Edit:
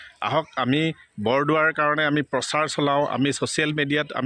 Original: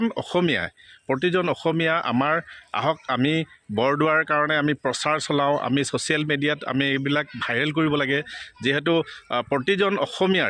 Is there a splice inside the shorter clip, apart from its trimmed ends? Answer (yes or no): no